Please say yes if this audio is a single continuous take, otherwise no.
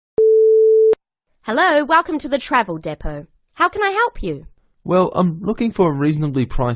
no